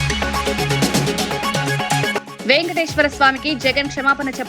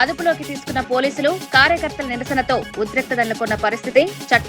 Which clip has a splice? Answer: first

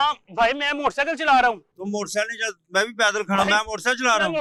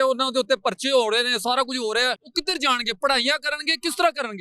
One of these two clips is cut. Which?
second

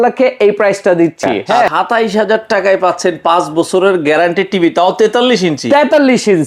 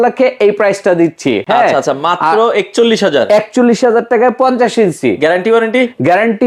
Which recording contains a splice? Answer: first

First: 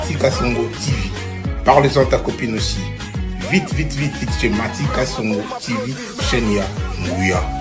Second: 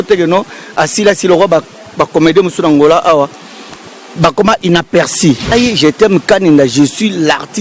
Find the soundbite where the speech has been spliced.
second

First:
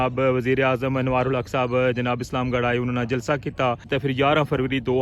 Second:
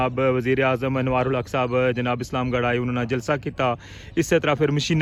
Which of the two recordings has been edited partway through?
first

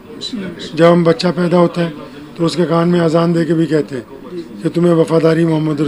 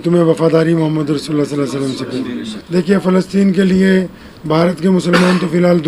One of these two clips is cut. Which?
second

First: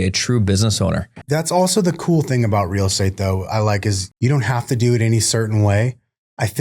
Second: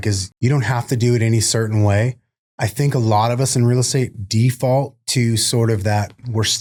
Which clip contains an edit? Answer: first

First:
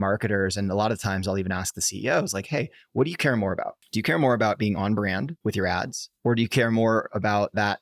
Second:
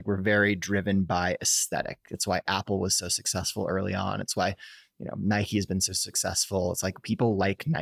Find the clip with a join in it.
first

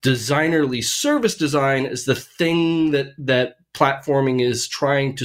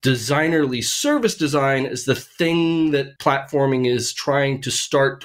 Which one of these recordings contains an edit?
second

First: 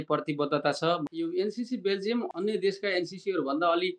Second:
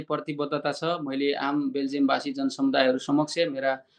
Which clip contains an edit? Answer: first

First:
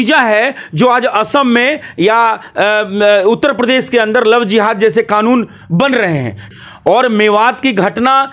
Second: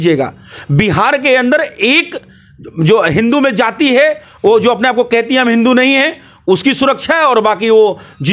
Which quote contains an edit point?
first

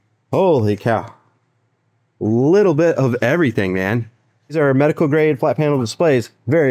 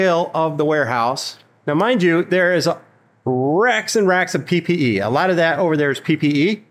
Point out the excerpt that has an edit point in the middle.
first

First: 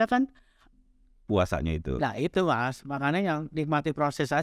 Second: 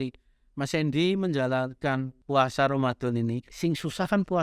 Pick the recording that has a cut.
second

